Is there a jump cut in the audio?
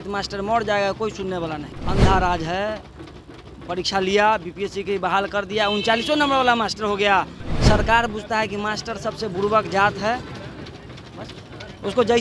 yes; 2 cuts; at 1.7 s, 7.4 s

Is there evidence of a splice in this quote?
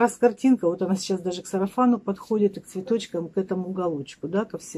no; 0 cuts

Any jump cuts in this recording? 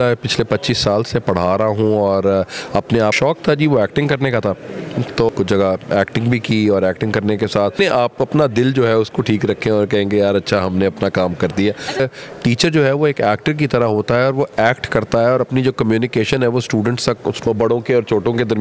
yes; 5 cuts; at 3.2 s, 5.3 s, 7.8 s, 12.0 s, 17.5 s

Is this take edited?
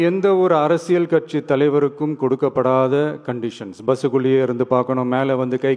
no; 0 cuts

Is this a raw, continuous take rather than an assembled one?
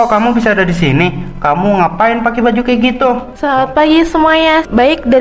no; 1 cut; at 3.3 s

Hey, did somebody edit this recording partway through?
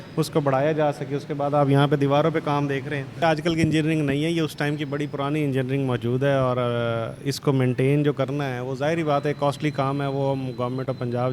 yes; 1 cut; at 3.0 s

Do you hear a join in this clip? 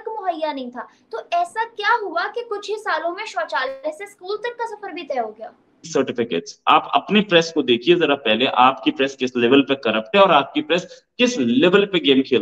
yes; 1 cut; at 5.9 s

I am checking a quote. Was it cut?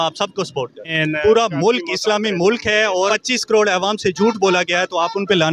yes; 2 cuts; at 0.9 s, 3.1 s

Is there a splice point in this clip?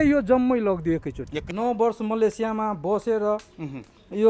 yes; 1 cut; at 1.4 s

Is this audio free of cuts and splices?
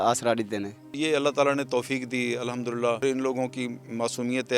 no; 2 cuts; at 0.9 s, 3.0 s

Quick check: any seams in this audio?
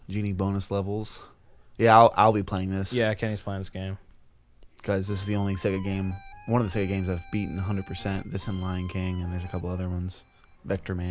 no; 0 cuts

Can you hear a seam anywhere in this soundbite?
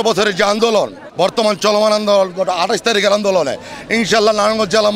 yes; 1 cut; at 1.0 s

